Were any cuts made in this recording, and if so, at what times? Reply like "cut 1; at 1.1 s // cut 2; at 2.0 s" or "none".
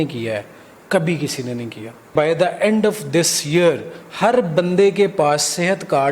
cut 1; at 2.1 s